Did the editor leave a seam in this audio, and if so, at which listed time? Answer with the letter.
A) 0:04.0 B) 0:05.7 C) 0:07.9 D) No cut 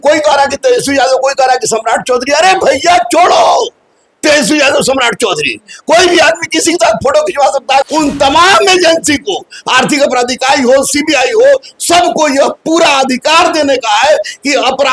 C